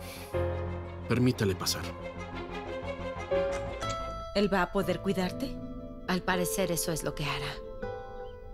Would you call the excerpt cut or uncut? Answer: cut